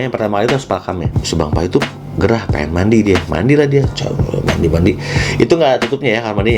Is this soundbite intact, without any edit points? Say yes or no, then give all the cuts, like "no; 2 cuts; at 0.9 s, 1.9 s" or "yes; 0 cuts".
no; 1 cut; at 1.2 s